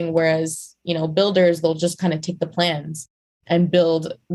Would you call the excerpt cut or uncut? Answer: uncut